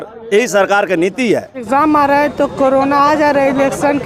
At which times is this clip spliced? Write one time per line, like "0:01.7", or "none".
0:01.7